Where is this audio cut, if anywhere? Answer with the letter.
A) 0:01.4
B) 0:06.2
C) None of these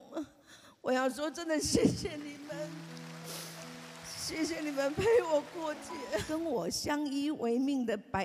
B